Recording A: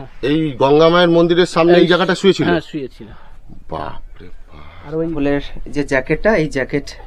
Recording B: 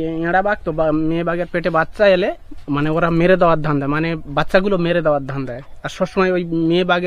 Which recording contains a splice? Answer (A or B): A